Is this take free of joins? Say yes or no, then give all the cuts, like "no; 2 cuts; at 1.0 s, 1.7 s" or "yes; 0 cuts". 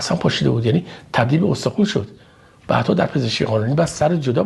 yes; 0 cuts